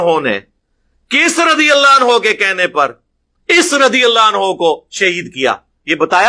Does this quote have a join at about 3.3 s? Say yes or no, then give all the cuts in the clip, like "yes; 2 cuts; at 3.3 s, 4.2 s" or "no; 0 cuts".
no; 0 cuts